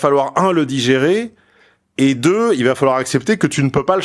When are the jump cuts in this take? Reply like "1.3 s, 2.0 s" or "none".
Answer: none